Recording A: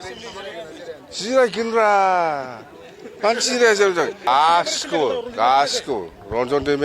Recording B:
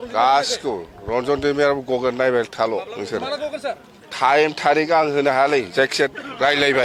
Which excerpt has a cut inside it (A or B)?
A